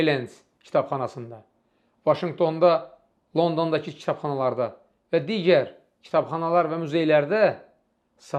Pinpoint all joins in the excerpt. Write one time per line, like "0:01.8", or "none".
none